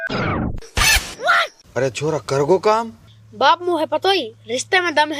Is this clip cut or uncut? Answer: uncut